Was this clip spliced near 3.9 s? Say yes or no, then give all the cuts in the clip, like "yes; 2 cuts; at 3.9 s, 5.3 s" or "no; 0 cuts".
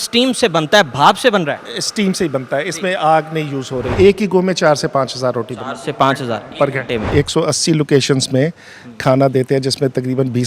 yes; 2 cuts; at 3.9 s, 7.1 s